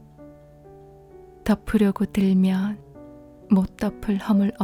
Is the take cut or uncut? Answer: uncut